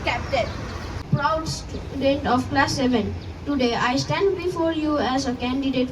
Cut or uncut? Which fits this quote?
cut